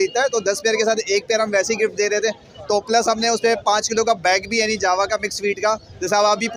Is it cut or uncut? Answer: uncut